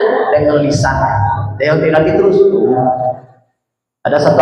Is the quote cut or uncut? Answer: cut